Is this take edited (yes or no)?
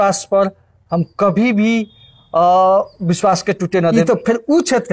yes